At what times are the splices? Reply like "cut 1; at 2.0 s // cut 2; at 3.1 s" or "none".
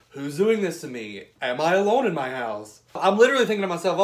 cut 1; at 3.0 s